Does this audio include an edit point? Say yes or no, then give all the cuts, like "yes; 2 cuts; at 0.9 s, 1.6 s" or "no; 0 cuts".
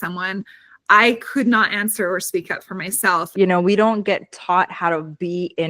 yes; 1 cut; at 3.3 s